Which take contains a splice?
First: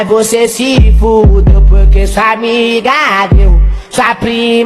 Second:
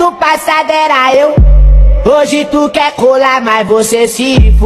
first; 1 cut; at 3.3 s

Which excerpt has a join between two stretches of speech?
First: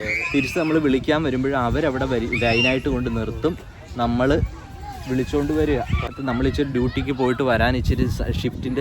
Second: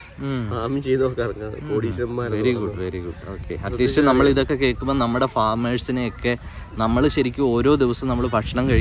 first; 1 cut; at 6.1 s

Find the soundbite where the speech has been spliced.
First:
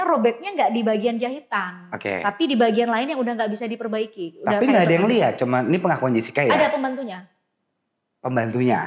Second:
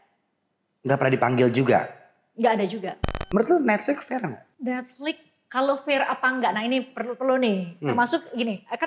second; 2 cuts; at 3.1 s, 4.5 s

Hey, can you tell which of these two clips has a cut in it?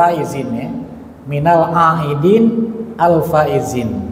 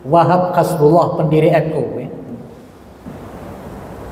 second; 1 cut; at 3.0 s

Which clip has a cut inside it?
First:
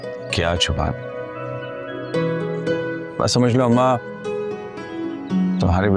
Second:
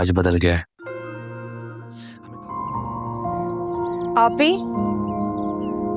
second; 1 cut; at 2.1 s

